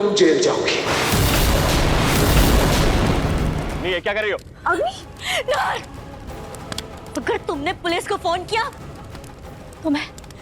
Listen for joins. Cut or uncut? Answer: cut